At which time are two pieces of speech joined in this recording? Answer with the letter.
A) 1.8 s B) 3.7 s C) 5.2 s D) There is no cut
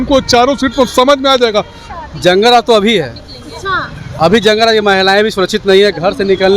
A